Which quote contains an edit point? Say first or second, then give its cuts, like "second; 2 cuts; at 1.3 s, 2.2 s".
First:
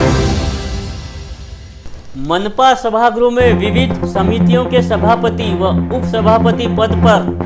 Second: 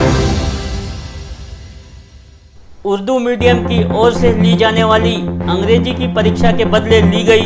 second; 1 cut; at 1.7 s